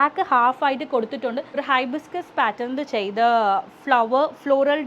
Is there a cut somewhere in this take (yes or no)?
yes